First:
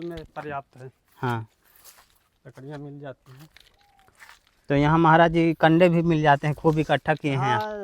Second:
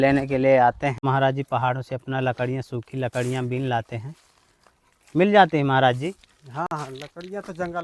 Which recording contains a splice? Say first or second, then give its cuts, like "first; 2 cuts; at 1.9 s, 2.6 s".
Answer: second; 1 cut; at 1.0 s